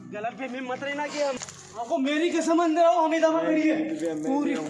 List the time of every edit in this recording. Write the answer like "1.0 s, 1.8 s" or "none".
1.4 s

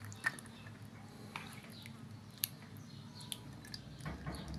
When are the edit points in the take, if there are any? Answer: none

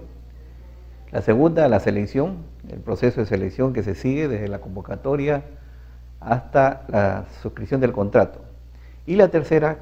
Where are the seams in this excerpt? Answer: none

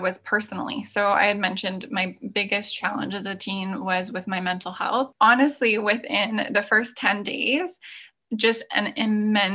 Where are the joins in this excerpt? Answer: 5.1 s

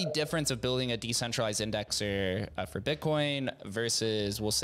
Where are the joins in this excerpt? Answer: none

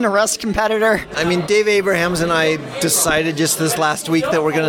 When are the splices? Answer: 1.1 s

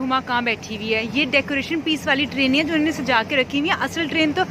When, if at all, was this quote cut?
none

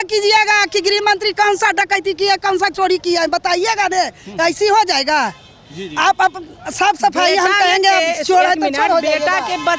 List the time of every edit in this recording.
none

